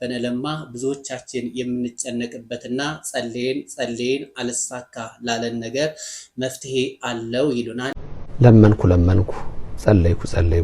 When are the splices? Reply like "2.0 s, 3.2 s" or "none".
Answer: 8.0 s